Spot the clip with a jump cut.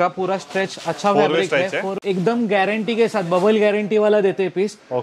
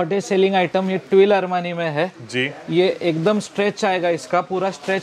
first; 1 cut; at 1.9 s

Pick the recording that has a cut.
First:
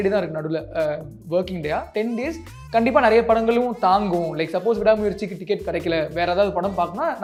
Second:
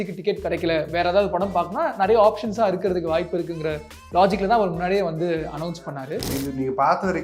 second; 1 cut; at 6.3 s

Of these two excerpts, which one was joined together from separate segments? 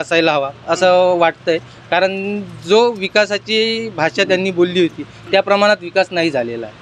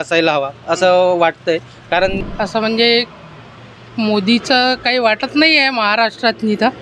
second; 1 cut; at 2.2 s

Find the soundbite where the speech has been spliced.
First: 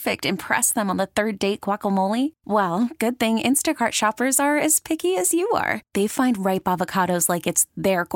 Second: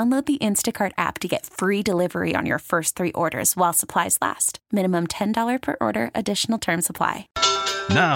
second; 1 cut; at 7.3 s

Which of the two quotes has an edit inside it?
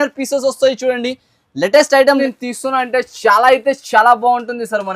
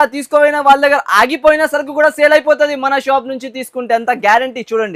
first; 1 cut; at 2.2 s

